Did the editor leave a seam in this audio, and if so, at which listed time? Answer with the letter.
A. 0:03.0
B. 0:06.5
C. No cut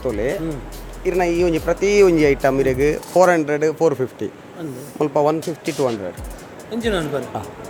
C